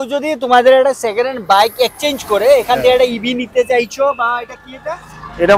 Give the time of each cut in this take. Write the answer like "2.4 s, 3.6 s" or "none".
none

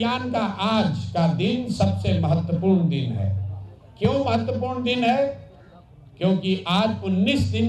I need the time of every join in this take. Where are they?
none

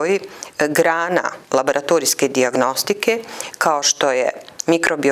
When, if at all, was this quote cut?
none

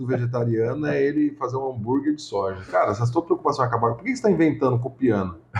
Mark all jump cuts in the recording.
none

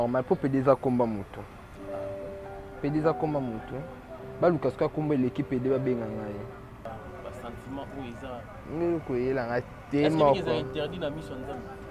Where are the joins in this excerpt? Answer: 6.9 s

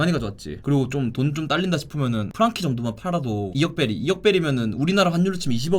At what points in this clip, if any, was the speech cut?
2.3 s

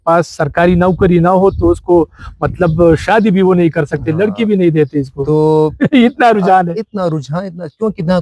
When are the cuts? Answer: none

